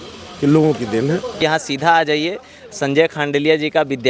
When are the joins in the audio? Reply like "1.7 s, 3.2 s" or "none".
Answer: 1.4 s